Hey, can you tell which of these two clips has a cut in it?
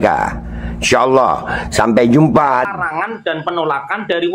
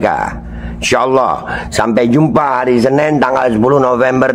first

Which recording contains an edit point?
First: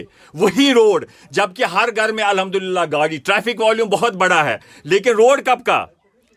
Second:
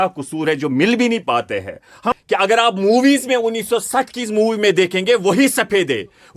second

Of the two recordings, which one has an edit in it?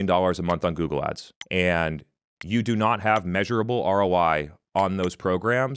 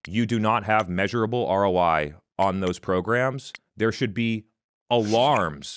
first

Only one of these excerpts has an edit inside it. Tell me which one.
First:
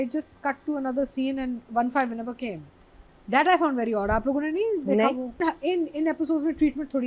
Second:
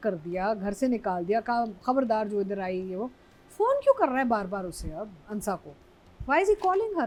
first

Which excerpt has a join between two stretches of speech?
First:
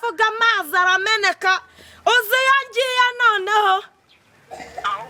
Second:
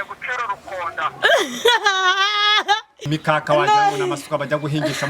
second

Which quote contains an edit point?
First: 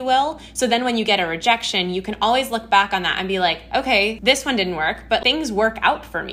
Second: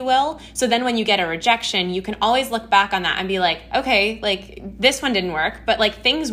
first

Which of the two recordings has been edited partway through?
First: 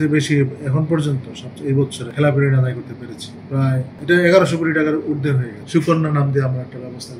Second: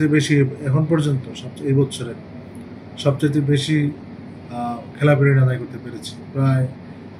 first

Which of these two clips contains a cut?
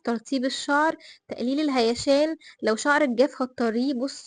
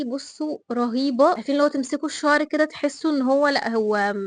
second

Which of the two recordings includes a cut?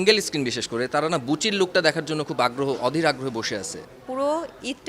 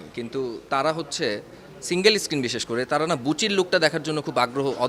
first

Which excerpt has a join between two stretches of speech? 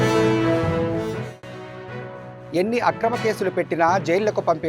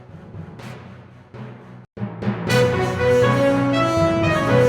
first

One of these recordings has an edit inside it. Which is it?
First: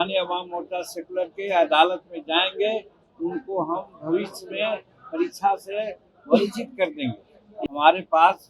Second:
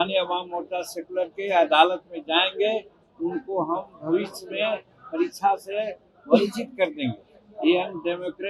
first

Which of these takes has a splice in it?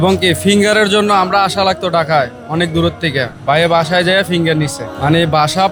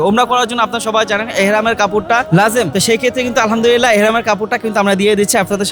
second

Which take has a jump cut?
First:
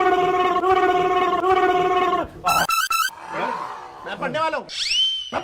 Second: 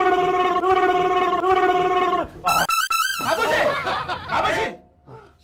first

